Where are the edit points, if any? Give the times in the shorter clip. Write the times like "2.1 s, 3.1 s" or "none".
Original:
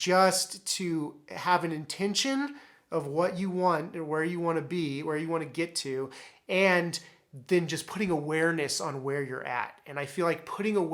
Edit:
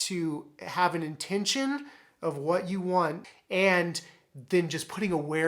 3.2 s